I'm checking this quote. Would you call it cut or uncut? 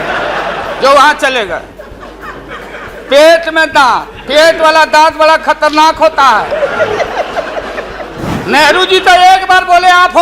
cut